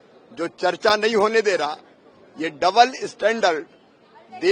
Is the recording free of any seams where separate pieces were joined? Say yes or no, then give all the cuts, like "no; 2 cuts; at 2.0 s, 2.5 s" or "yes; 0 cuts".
yes; 0 cuts